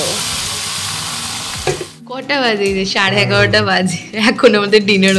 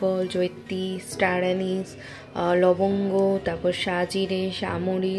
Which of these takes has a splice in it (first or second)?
first